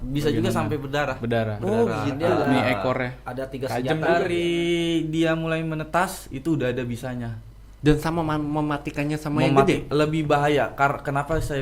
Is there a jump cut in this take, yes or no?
yes